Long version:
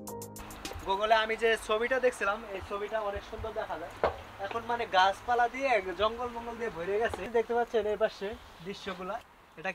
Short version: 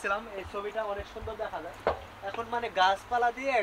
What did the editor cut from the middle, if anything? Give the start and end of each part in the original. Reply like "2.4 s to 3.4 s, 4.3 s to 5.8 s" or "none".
none